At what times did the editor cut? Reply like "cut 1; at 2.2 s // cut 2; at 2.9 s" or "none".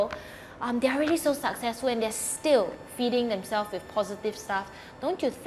none